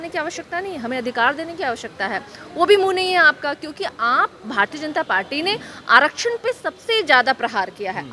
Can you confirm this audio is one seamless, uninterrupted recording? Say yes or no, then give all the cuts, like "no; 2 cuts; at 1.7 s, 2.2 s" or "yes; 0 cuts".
yes; 0 cuts